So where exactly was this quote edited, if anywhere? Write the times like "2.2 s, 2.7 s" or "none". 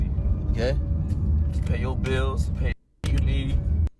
none